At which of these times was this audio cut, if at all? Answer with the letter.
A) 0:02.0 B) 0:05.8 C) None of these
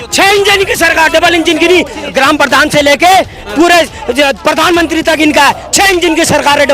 A